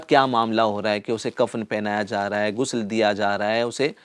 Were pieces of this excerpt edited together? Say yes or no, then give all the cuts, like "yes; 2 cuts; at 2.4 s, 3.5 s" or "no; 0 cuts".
no; 0 cuts